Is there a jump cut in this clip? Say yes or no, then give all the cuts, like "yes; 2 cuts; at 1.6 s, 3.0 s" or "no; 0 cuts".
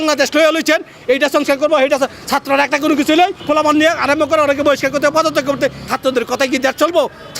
yes; 2 cuts; at 3.4 s, 5.9 s